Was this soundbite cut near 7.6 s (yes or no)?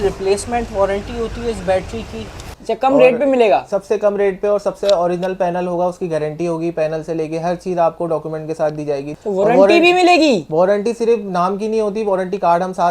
no